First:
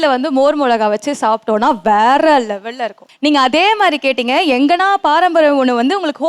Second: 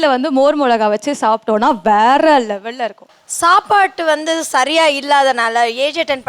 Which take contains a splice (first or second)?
second